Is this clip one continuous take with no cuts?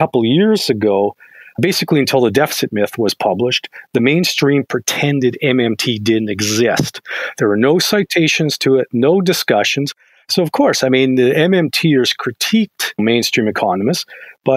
yes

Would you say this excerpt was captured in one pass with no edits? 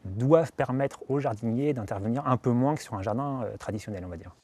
no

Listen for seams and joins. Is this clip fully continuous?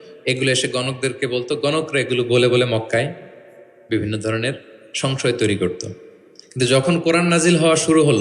yes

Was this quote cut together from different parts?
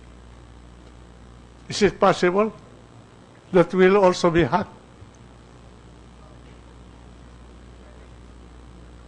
yes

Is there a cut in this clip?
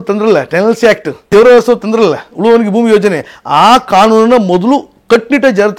yes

